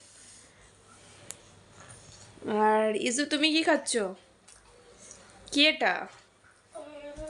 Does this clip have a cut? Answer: no; 0 cuts

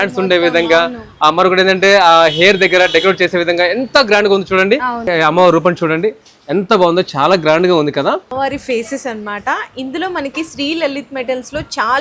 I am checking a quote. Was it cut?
yes; 2 cuts; at 5.1 s, 8.3 s

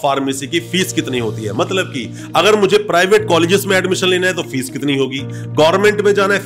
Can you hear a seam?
no; 0 cuts

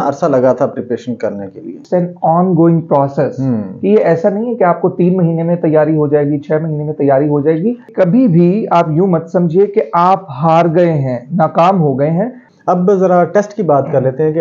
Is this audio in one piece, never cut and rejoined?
no; 3 cuts; at 1.8 s, 7.9 s, 12.5 s

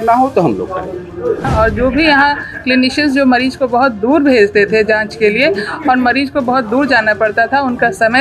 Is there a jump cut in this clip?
yes; 1 cut; at 1.3 s

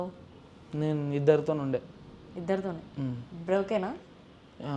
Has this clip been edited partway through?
no; 0 cuts

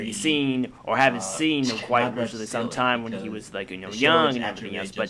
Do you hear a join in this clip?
no; 0 cuts

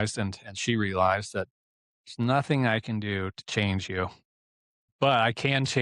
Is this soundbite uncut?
no; 1 cut; at 4.7 s

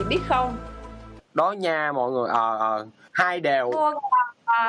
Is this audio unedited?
yes; 0 cuts

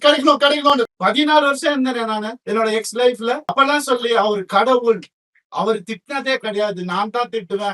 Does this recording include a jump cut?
yes; 3 cuts; at 0.8 s, 2.3 s, 3.5 s

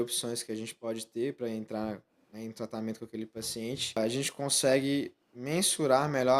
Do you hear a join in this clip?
yes; 1 cut; at 4.0 s

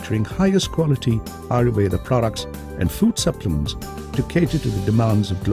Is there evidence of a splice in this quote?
yes; 1 cut; at 3.7 s

